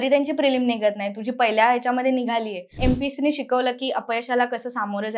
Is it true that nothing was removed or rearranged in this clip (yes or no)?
no